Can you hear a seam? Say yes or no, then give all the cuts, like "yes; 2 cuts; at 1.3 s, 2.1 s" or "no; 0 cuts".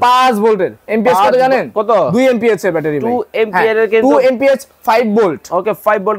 no; 0 cuts